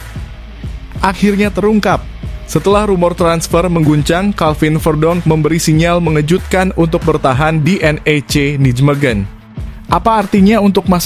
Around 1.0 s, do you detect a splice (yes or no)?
yes